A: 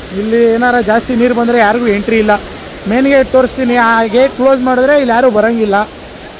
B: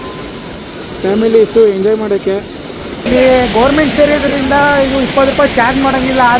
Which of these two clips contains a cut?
B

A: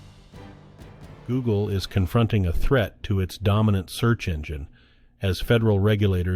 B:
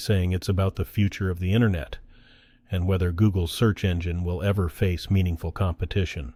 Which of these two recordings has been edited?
A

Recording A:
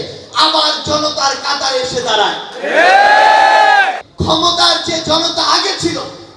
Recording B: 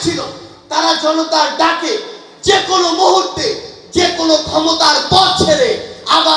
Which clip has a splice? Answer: A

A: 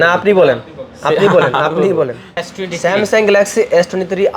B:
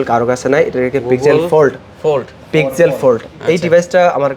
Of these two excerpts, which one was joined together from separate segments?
A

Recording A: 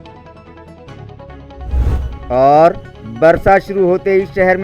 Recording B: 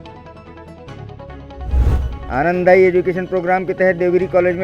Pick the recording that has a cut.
B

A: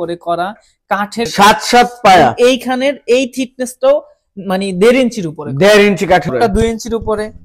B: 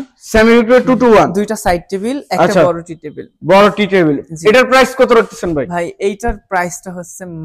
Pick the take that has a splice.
A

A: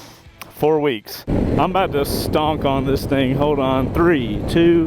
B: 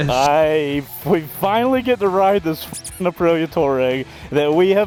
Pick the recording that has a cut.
A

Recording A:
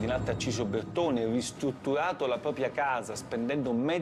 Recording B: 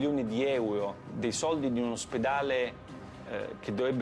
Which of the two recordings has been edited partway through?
B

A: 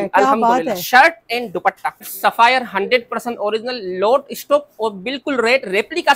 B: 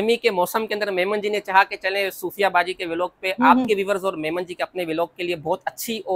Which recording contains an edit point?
A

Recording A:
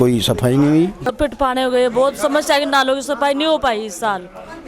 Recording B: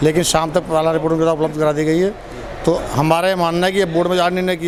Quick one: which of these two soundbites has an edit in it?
A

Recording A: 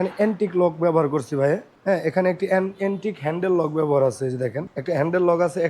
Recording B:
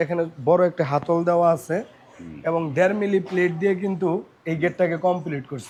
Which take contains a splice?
A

